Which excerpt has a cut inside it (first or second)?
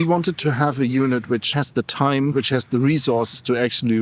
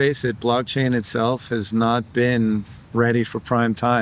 first